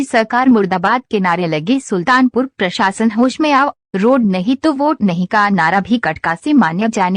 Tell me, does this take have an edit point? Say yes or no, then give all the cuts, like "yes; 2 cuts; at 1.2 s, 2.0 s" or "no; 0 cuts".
yes; 1 cut; at 5.0 s